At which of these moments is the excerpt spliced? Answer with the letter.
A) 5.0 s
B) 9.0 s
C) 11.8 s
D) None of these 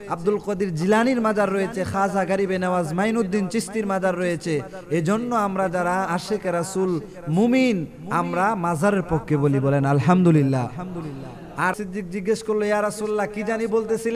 C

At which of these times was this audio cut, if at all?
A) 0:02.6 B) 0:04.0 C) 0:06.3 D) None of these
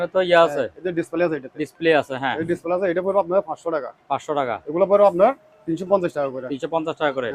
D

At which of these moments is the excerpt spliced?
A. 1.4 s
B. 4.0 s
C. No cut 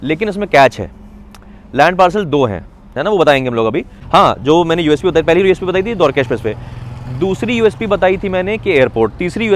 B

